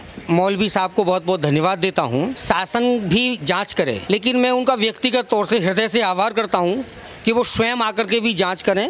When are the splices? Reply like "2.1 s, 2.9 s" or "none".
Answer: 2.4 s, 4.0 s